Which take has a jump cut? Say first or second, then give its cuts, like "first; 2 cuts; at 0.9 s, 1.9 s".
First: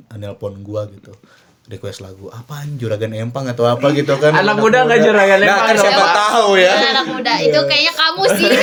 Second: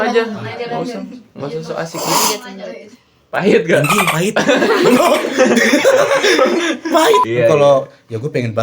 second; 1 cut; at 7.2 s